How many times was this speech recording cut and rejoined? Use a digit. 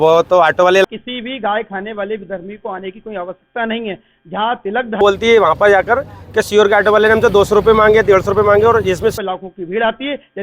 3